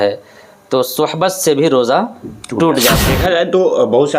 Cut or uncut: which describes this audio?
cut